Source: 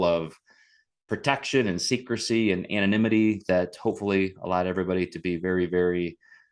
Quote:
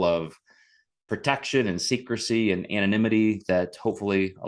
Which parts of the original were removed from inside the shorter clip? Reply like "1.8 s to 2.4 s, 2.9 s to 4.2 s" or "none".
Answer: none